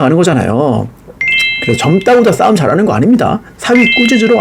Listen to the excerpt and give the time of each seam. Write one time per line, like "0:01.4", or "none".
0:03.5